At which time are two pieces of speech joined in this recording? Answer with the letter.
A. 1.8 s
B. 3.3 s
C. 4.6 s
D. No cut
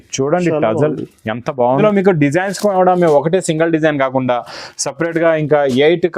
A